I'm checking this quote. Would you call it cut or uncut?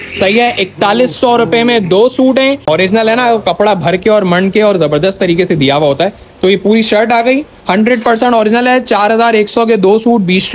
cut